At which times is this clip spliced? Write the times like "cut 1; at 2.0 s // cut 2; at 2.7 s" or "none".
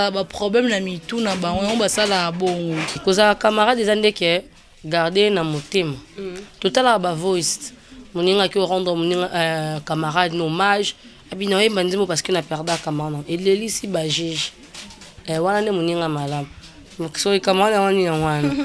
cut 1; at 3.0 s